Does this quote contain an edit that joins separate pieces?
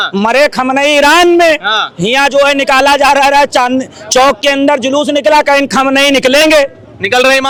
no; 0 cuts

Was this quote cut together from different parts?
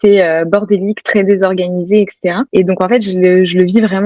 no; 0 cuts

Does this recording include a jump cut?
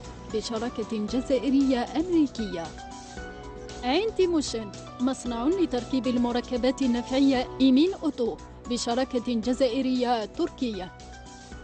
no; 0 cuts

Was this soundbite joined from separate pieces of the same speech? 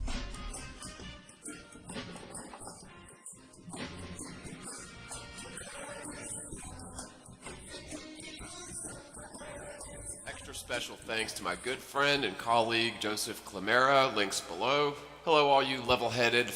yes; 1 cut; at 15.3 s

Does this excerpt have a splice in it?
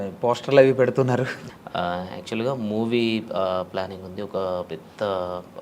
yes; 1 cut; at 1.5 s

